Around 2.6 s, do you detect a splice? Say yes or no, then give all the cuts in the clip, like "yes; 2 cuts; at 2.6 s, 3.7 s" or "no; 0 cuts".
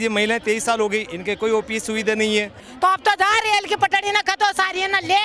yes; 1 cut; at 2.6 s